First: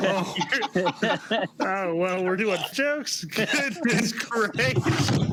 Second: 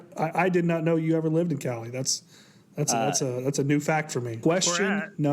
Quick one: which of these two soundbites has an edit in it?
second; 1 cut; at 4.4 s

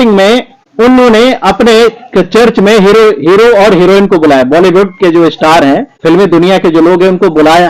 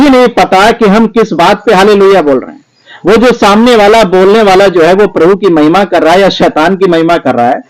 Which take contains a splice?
first; 1 cut; at 5.9 s

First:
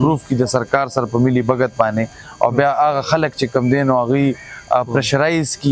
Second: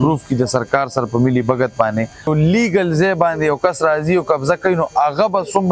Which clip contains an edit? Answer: second; 1 cut; at 2.3 s

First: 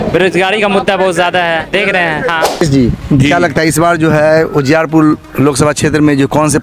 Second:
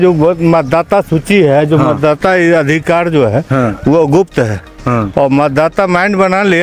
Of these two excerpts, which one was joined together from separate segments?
first; 1 cut; at 2.6 s

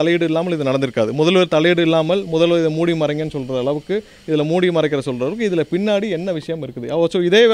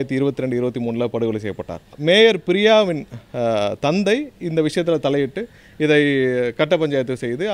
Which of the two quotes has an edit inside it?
second; 1 cut; at 1.9 s

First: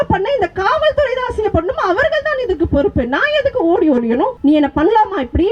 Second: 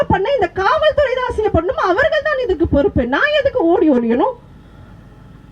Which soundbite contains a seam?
first; 1 cut; at 4.4 s

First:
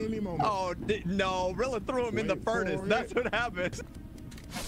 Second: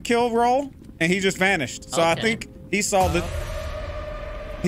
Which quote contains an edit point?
first; 1 cut; at 3.8 s

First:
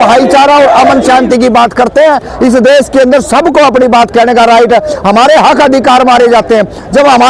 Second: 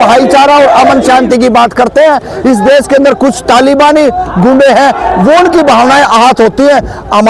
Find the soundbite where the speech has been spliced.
first; 1 cut; at 2.3 s

